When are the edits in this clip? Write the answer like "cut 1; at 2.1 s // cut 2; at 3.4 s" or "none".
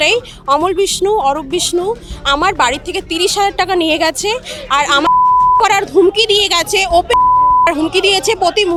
none